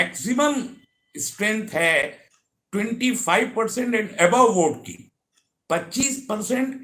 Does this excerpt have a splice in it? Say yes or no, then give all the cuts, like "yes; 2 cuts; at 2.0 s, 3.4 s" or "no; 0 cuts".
no; 0 cuts